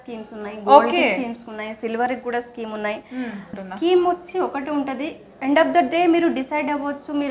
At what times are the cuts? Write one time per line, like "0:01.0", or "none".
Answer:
0:03.5